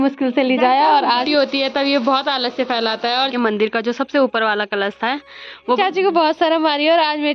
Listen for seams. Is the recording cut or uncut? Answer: cut